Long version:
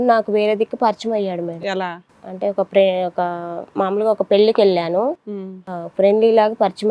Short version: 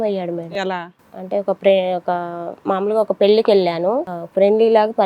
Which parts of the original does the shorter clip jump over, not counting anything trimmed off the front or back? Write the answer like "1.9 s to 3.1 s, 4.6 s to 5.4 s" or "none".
5.3 s to 5.8 s